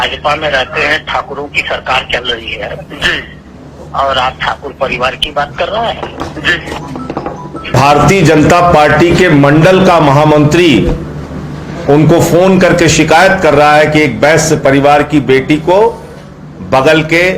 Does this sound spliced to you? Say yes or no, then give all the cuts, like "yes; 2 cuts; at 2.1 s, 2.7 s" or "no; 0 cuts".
yes; 1 cut; at 7.8 s